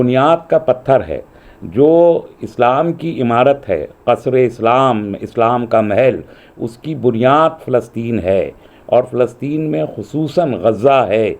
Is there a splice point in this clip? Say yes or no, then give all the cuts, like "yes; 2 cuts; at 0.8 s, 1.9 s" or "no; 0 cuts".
no; 0 cuts